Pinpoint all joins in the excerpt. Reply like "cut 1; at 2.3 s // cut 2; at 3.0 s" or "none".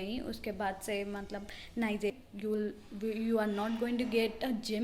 cut 1; at 2.1 s